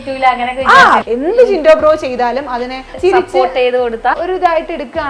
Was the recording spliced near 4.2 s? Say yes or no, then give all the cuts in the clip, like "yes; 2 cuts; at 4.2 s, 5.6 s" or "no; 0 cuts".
yes; 3 cuts; at 1.0 s, 2.9 s, 4.2 s